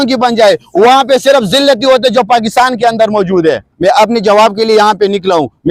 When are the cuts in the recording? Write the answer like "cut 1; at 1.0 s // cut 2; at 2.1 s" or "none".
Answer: cut 1; at 3.7 s